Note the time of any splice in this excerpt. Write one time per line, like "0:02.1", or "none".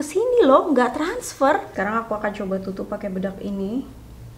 0:01.7